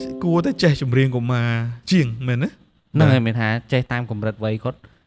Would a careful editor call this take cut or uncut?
uncut